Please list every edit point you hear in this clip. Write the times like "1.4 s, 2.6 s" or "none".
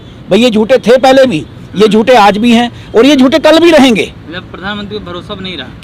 none